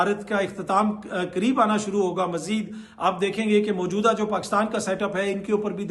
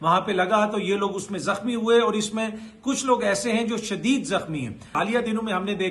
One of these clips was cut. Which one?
second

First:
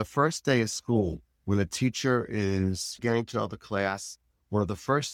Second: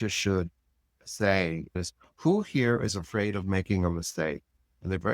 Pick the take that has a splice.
second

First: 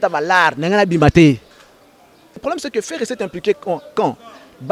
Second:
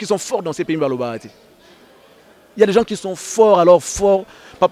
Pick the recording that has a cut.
first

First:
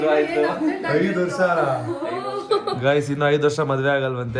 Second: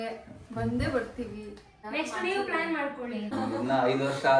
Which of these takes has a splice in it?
second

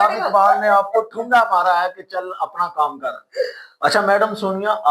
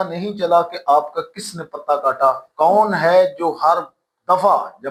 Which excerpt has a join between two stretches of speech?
first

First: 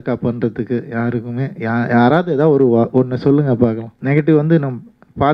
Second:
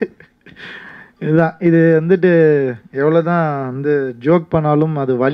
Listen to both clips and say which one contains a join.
first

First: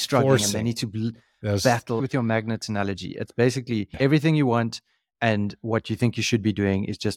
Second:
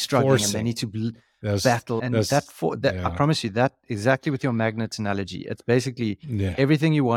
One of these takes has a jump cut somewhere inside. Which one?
first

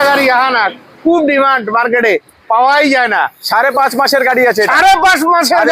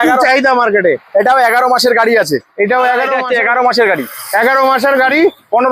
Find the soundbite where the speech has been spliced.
second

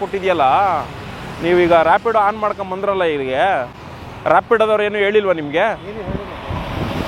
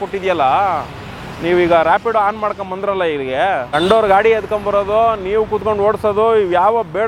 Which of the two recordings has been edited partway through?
second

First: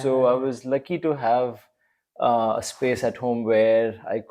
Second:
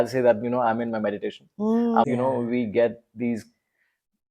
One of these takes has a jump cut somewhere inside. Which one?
second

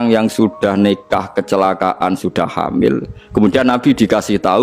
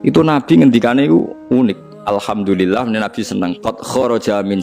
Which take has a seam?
second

